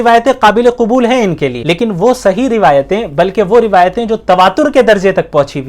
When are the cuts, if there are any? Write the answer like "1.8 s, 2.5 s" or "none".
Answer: 1.6 s

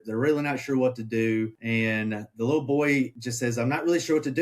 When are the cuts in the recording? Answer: 1.6 s, 3.2 s

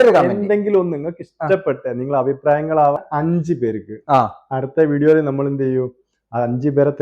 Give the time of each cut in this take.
3.0 s

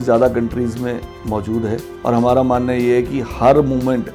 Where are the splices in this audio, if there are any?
1.1 s, 1.9 s

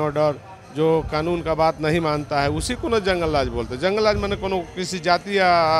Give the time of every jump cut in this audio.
none

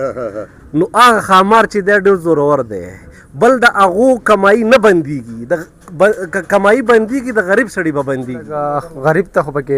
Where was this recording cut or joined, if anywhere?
8.5 s

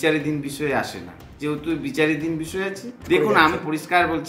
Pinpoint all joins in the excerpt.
3.0 s

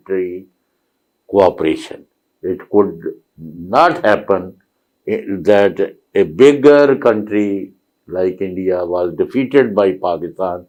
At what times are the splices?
none

